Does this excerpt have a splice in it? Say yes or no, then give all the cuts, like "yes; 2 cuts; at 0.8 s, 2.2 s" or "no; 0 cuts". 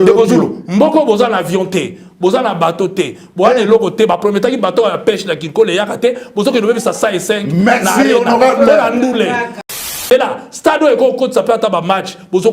yes; 1 cut; at 9.8 s